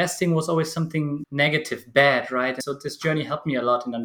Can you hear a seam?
yes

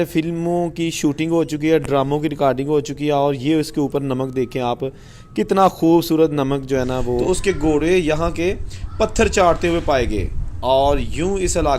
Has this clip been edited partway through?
yes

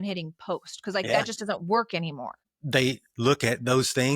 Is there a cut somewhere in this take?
yes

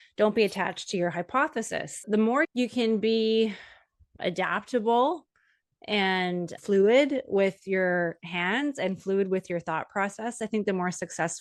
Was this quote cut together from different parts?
no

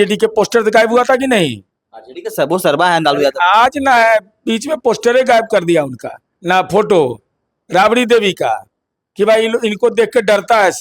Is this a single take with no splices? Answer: yes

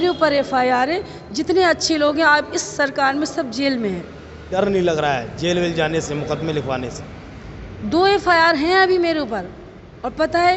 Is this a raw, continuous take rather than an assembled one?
no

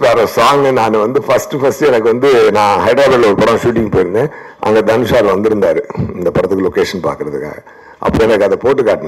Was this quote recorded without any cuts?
yes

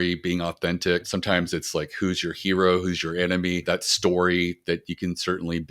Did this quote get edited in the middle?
yes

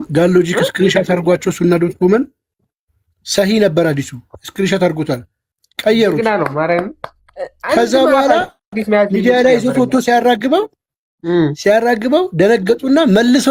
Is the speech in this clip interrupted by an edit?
no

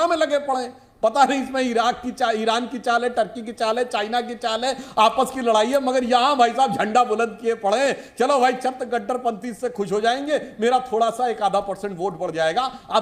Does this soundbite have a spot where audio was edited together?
no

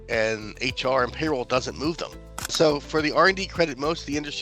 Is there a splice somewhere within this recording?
yes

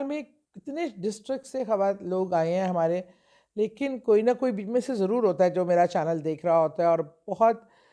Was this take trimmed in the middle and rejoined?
no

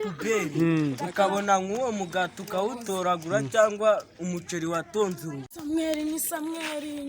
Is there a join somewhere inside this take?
yes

